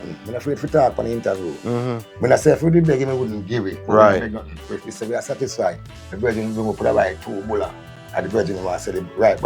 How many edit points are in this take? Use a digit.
0